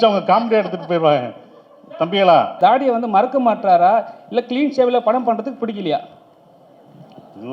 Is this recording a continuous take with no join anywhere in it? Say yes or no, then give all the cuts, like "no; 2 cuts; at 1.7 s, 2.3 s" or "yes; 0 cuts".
no; 1 cut; at 2.5 s